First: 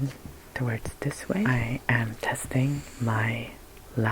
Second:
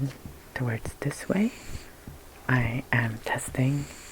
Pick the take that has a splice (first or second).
first